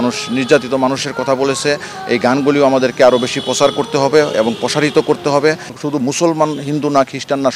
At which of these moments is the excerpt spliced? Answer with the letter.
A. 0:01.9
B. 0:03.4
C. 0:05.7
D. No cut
C